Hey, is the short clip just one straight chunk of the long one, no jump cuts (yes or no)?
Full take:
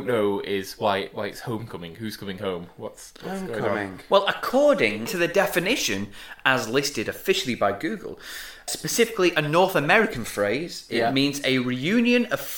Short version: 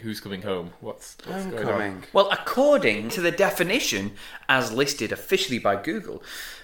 yes